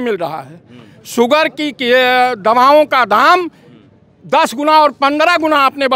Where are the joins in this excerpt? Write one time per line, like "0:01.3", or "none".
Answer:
none